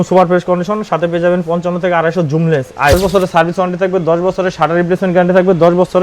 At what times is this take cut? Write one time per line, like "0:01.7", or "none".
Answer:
0:02.9